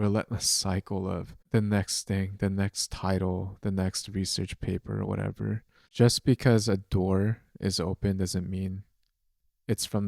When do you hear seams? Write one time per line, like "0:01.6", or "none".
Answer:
0:01.4
0:05.9